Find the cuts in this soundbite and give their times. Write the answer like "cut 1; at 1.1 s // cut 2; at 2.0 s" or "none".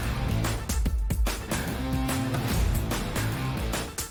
none